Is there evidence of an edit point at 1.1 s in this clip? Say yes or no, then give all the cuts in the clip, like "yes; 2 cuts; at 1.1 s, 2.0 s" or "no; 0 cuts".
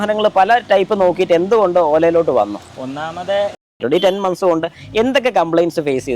no; 1 cut; at 3.8 s